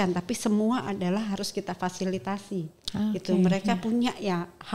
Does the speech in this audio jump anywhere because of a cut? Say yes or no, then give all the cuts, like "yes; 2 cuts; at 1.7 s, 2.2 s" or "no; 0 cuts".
no; 0 cuts